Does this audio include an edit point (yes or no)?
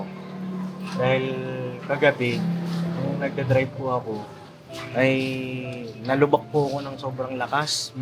no